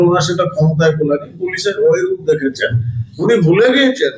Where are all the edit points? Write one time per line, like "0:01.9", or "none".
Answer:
0:03.2